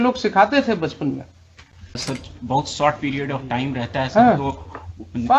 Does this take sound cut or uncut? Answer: cut